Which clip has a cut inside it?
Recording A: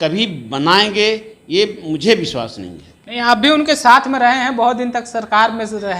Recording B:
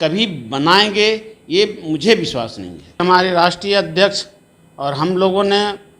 B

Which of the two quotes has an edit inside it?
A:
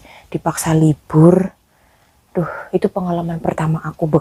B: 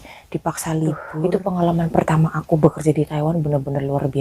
B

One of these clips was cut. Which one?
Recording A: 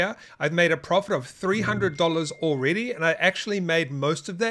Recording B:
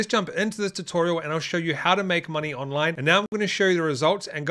B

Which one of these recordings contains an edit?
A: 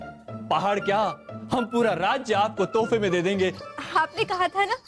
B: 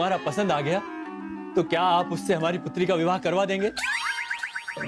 A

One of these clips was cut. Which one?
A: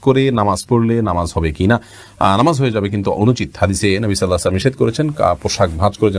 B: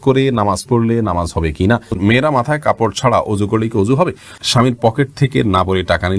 B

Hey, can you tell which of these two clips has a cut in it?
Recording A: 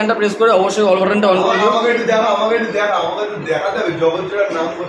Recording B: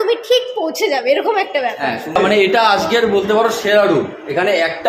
B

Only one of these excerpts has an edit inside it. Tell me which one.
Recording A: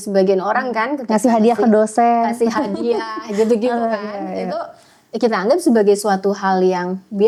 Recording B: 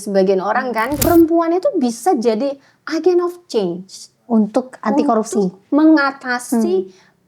B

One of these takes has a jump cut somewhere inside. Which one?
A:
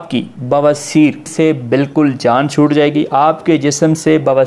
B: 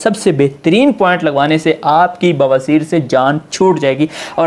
A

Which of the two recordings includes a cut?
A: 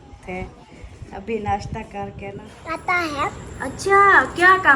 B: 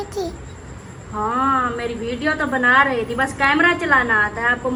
A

